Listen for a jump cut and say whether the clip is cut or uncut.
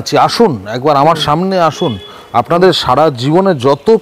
uncut